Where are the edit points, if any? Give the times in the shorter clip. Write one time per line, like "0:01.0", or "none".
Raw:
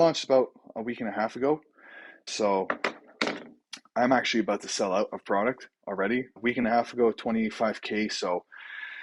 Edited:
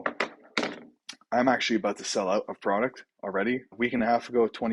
none